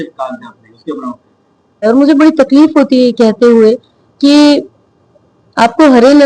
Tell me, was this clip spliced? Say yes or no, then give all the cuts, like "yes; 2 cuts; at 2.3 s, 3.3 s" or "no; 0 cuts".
yes; 1 cut; at 1.9 s